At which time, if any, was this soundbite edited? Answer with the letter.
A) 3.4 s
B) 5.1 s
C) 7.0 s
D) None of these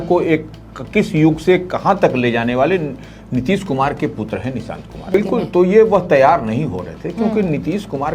B